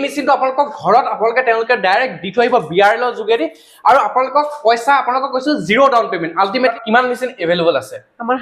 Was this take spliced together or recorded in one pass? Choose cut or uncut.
cut